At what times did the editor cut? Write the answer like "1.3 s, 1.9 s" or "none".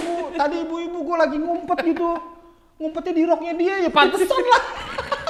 none